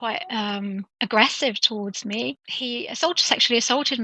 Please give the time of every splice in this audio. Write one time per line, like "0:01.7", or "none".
0:00.9
0:02.5